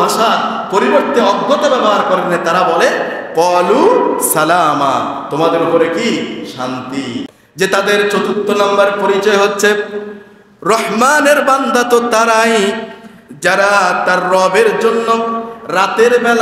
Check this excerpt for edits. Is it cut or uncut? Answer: cut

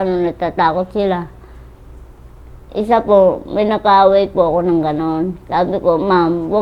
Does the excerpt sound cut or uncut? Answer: uncut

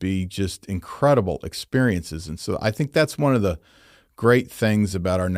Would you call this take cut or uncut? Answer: uncut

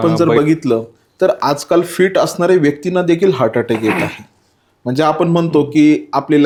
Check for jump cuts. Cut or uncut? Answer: uncut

